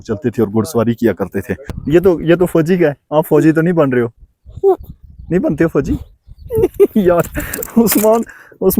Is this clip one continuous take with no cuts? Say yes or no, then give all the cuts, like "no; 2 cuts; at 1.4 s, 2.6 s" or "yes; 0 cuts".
no; 1 cut; at 1.8 s